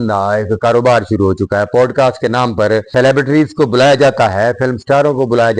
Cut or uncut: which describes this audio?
cut